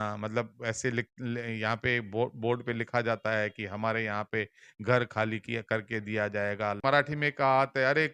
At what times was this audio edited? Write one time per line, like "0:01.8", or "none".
0:06.8